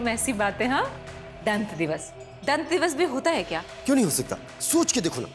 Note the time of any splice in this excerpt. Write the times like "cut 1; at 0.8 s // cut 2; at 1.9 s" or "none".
none